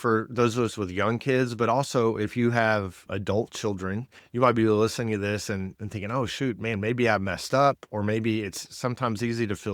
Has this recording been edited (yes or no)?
yes